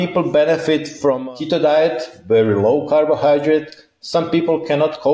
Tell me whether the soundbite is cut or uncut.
cut